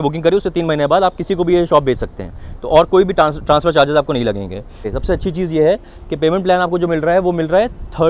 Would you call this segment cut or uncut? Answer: cut